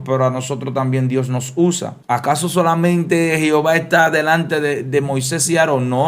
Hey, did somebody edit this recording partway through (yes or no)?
yes